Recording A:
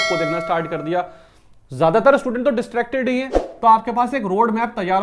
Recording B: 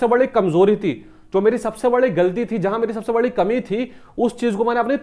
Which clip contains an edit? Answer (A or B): A